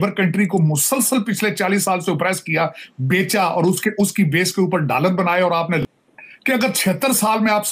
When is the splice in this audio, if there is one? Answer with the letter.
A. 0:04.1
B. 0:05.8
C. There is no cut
B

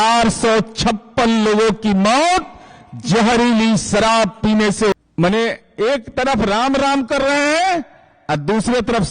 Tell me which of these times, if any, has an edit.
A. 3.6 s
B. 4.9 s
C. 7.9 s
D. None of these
B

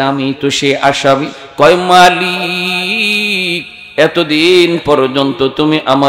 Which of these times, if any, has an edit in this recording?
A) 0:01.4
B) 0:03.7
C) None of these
A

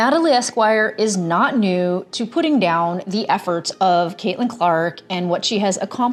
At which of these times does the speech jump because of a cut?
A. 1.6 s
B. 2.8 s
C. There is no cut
C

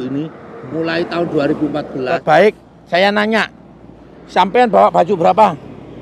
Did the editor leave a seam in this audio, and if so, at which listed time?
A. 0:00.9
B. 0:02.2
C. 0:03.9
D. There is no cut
B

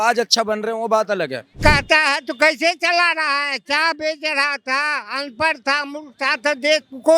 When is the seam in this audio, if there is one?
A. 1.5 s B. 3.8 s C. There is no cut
A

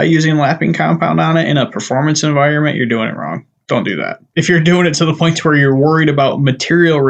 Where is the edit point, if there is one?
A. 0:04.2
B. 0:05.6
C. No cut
A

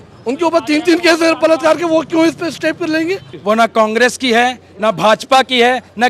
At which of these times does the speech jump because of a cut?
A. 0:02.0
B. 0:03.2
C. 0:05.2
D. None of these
B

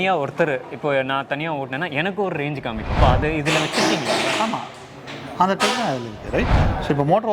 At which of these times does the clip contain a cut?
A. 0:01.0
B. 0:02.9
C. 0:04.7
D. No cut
B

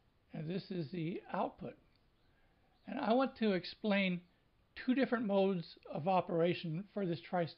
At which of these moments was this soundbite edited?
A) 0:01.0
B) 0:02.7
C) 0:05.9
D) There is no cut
B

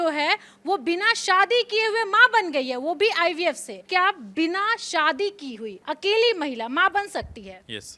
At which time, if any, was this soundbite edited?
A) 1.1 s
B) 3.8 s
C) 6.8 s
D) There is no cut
B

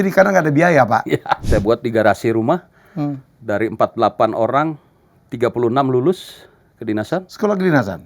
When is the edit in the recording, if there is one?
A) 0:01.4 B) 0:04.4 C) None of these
A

